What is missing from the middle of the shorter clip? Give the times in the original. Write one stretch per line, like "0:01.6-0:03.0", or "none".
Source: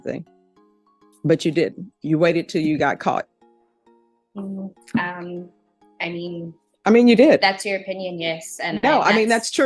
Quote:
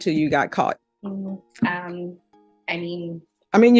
0:03.4-0:04.2